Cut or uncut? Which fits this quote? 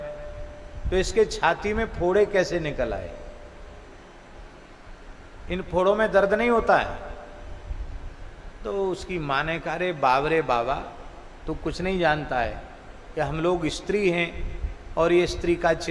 uncut